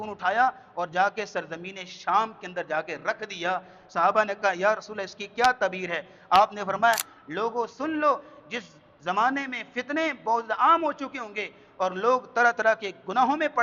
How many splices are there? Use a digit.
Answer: 1